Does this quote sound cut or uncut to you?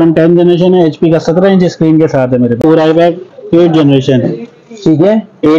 cut